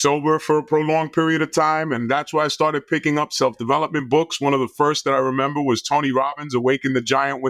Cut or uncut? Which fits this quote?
uncut